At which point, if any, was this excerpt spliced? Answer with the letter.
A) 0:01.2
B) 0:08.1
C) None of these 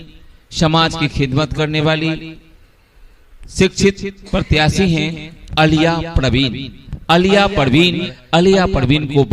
B